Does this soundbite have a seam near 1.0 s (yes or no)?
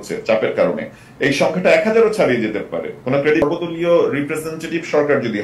no